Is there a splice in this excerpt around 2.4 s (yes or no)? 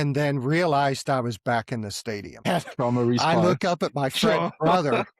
yes